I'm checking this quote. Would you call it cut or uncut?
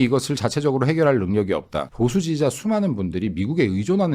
cut